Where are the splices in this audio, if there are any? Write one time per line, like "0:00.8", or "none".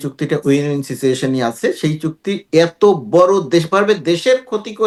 none